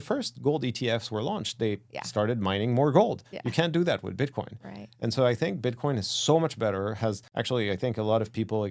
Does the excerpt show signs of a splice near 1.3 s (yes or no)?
no